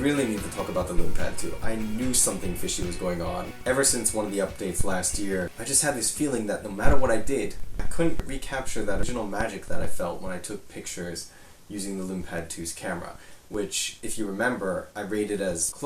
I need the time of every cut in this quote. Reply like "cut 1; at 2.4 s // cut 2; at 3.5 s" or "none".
cut 1; at 8.3 s